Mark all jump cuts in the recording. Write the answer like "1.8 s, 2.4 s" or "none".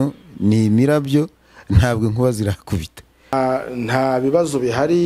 3.3 s